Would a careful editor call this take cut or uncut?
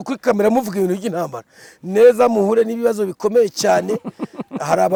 uncut